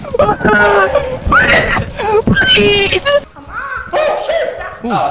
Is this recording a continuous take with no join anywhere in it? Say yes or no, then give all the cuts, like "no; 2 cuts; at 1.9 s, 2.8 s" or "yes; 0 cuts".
no; 1 cut; at 3.2 s